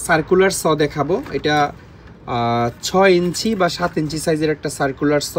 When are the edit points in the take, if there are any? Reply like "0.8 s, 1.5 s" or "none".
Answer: none